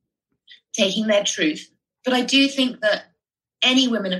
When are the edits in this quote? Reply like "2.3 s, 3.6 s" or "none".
none